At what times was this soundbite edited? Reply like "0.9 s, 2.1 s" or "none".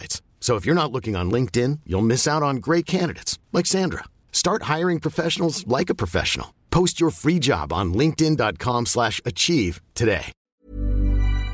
10.4 s